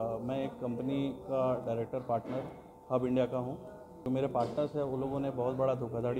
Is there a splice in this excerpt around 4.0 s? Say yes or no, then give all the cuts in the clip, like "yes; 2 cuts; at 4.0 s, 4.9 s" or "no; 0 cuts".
yes; 1 cut; at 4.0 s